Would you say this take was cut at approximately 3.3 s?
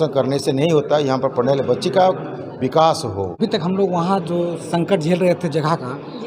yes; 1 cut; at 3.3 s

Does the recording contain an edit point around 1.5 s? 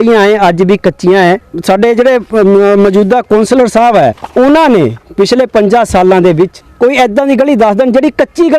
yes; 3 cuts; at 1.5 s, 4.2 s, 6.6 s

